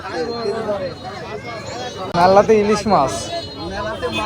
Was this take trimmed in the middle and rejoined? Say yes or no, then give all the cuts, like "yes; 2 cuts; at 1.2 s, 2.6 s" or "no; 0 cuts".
yes; 1 cut; at 2.1 s